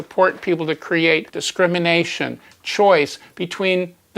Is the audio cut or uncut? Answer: cut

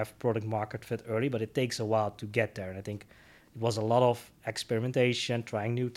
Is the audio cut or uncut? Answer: uncut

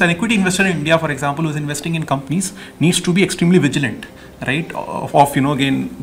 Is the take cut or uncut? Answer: uncut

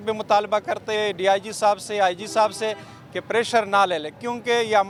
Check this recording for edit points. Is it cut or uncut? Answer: uncut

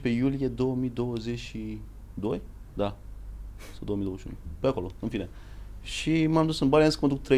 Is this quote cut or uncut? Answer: uncut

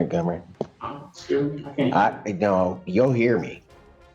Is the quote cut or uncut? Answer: uncut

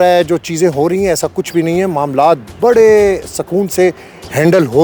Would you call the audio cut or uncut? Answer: uncut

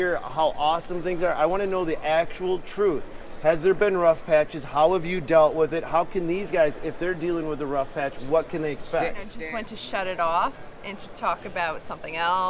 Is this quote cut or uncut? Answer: cut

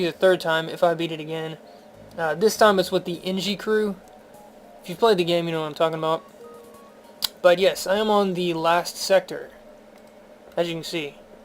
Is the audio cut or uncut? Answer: cut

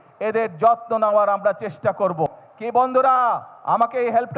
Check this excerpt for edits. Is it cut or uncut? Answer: cut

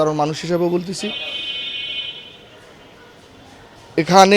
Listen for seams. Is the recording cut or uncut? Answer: uncut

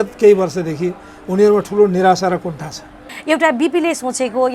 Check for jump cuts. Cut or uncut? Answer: cut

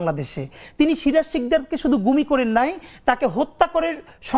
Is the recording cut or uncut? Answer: uncut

